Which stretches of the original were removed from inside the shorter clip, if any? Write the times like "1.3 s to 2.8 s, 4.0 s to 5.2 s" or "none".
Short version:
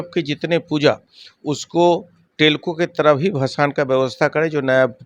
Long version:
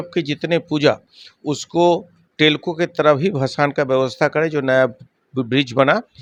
none